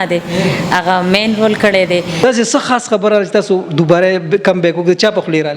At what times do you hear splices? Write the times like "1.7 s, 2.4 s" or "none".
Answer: 2.2 s